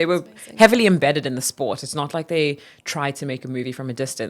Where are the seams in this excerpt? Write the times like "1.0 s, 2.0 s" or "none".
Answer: none